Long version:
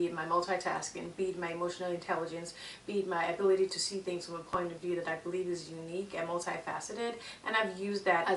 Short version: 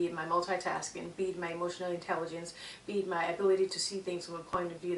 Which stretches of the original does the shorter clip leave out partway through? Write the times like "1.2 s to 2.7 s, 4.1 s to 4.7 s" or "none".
none